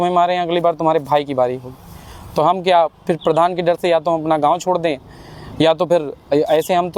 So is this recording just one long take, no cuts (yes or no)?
yes